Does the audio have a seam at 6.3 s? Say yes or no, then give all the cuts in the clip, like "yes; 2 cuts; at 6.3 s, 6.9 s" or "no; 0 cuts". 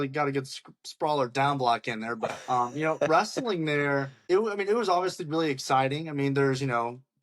no; 2 cuts; at 2.3 s, 4.1 s